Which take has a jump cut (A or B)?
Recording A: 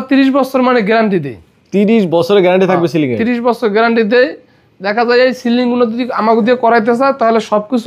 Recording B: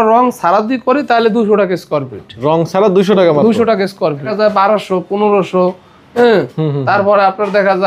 B